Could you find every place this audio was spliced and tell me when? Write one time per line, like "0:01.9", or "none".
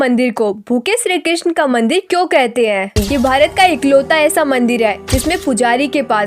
0:03.0